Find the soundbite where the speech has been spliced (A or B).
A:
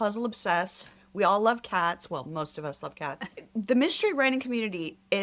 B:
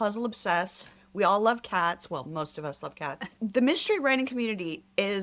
B